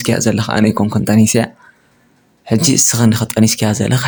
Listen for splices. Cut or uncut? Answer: uncut